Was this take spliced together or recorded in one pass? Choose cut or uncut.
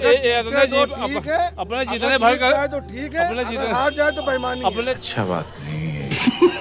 cut